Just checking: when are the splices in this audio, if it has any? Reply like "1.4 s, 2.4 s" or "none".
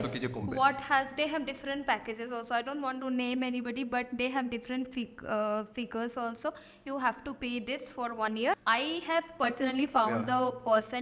8.5 s